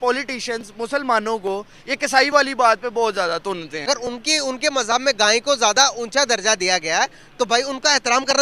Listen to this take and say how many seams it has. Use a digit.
1